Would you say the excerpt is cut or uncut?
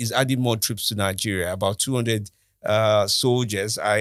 uncut